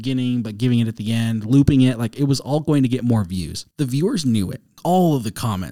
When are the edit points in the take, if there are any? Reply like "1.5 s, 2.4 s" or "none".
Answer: 3.6 s, 4.8 s